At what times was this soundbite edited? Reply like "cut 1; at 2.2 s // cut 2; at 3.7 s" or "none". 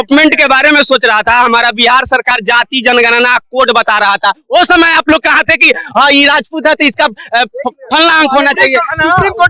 none